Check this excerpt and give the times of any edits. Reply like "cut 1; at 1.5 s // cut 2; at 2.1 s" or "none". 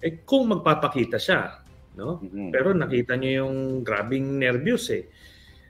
cut 1; at 2.7 s